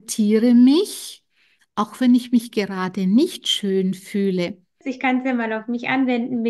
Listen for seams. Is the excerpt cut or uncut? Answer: cut